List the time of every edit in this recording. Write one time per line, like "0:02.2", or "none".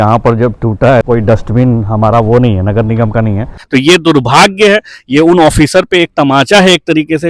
0:01.0
0:03.5